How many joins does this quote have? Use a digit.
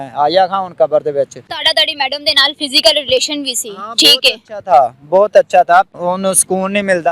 2